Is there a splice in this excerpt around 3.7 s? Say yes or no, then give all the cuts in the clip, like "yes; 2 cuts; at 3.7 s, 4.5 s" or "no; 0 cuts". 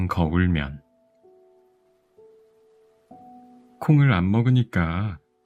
yes; 2 cuts; at 1.0 s, 3.7 s